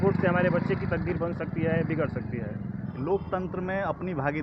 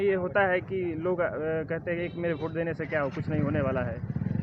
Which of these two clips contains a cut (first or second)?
first